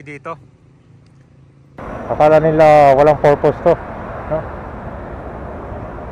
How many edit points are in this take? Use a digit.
1